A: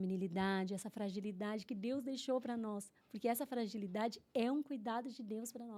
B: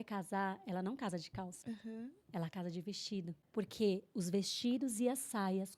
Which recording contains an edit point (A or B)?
B